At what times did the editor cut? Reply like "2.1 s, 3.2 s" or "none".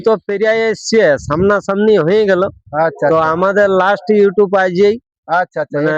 none